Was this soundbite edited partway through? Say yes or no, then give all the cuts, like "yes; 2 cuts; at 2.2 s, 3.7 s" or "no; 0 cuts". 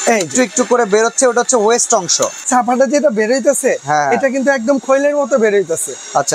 yes; 1 cut; at 2.4 s